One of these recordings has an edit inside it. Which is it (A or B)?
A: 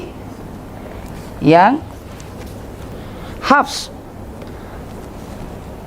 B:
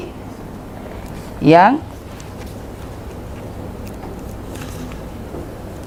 A